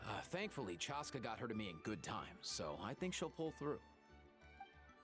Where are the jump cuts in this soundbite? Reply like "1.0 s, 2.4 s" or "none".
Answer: 3.8 s